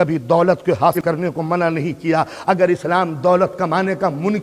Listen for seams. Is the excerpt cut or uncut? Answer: cut